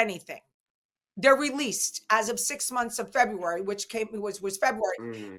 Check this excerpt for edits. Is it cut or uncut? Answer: uncut